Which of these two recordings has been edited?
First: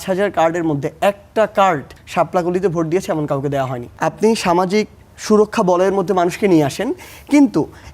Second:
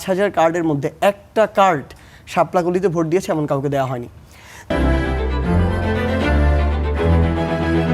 first; 2 cuts; at 2.0 s, 3.8 s

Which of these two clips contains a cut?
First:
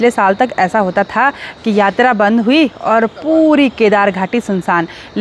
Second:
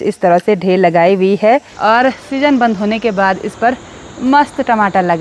second; 1 cut; at 1.7 s

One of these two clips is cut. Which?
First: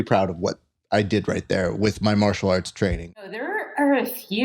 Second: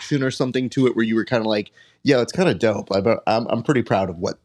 first; 1 cut; at 3.3 s

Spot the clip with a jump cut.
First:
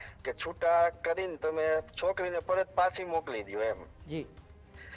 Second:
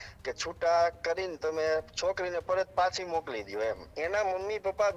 second; 1 cut; at 3.9 s

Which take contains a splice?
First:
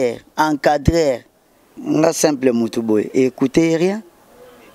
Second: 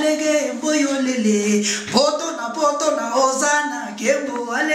first; 1 cut; at 1.8 s

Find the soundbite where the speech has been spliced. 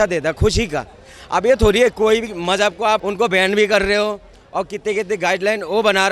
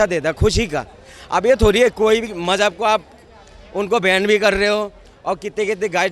first; 1 cut; at 3.1 s

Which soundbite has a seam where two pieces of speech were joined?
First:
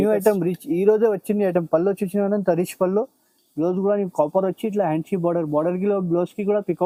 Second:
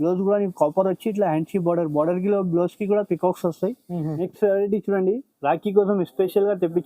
second; 1 cut; at 4.2 s

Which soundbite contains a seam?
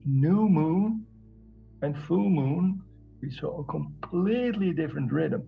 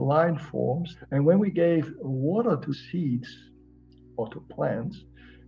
second; 2 cuts; at 0.9 s, 2.8 s

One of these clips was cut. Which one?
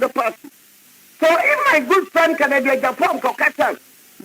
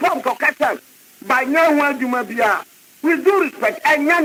first; 1 cut; at 2.1 s

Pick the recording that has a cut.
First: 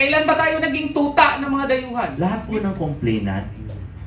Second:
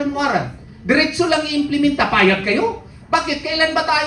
first; 1 cut; at 2.1 s

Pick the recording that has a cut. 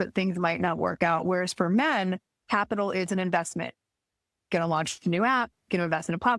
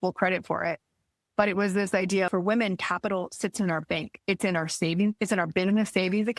second; 1 cut; at 2.3 s

